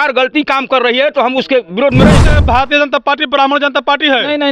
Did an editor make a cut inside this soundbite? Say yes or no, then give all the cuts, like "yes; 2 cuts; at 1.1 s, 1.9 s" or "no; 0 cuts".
yes; 1 cut; at 2.2 s